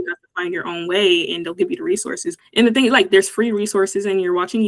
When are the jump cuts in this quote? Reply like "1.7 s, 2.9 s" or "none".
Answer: 2.3 s